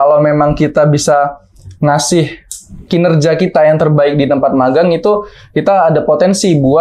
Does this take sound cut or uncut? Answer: uncut